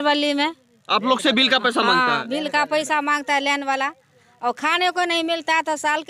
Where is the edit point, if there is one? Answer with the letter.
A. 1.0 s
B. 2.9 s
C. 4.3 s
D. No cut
D